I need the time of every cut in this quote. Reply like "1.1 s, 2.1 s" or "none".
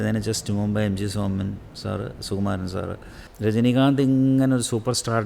3.3 s